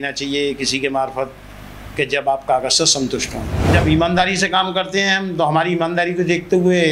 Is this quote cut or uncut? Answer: cut